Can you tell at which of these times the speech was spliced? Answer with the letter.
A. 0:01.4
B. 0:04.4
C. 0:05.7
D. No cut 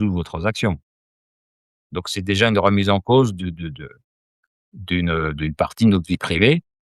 A